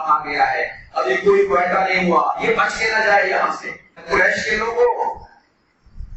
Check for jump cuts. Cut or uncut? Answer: cut